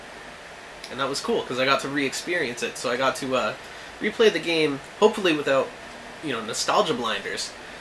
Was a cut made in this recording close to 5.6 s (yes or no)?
yes